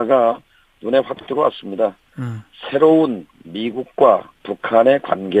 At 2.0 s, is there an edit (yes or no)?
yes